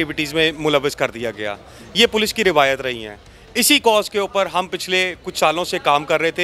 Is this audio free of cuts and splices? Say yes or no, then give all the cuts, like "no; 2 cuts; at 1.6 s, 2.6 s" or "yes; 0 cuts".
yes; 0 cuts